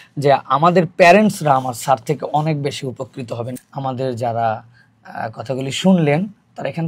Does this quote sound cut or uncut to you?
cut